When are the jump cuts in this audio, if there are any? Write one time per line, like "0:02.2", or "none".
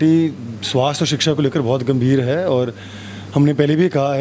none